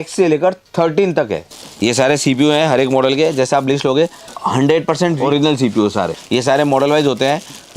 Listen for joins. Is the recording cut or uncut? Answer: cut